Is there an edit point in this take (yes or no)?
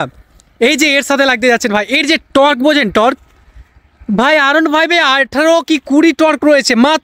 no